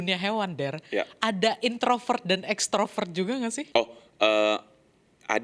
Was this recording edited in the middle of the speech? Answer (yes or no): yes